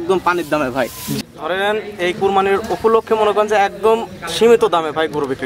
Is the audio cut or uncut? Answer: cut